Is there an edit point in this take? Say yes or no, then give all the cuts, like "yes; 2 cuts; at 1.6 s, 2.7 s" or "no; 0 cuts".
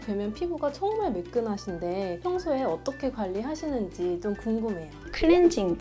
no; 0 cuts